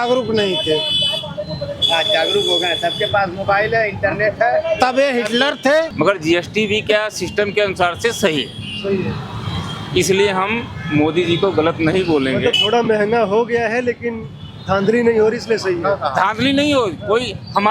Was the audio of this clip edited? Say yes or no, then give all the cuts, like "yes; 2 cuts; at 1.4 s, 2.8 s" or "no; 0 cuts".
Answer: yes; 1 cut; at 5.9 s